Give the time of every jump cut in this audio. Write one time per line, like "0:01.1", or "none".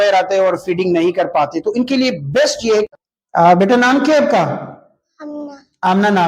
0:02.9